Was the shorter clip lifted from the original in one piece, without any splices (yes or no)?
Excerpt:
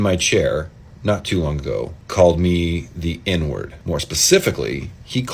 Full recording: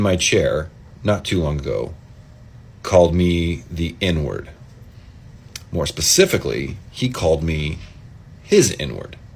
no